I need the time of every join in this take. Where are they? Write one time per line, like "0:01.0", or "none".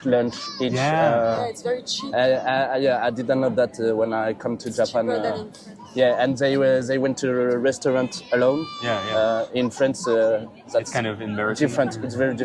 none